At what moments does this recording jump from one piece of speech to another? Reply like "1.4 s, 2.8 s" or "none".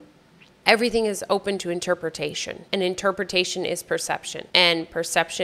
2.5 s